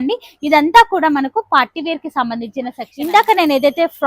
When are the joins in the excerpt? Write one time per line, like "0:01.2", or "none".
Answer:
0:02.9